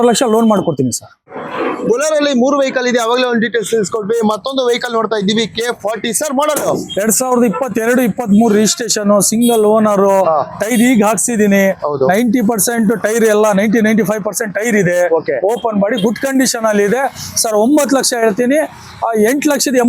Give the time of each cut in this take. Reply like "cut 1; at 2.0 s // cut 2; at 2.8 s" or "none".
cut 1; at 1.1 s